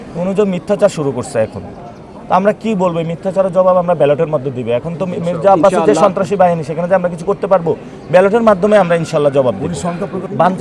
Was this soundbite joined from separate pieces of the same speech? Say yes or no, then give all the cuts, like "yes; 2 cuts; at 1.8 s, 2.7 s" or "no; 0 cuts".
no; 0 cuts